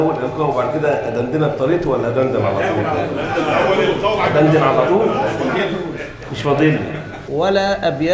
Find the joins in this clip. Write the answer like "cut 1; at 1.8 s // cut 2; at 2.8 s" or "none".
cut 1; at 7.2 s